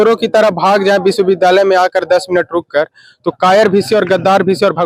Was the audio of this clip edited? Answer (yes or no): no